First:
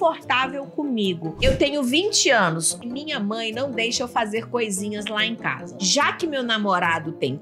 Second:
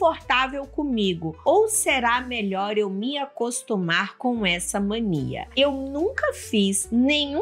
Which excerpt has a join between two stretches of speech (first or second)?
first